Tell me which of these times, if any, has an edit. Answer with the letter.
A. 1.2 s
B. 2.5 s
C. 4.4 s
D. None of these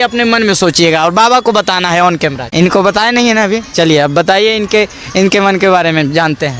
B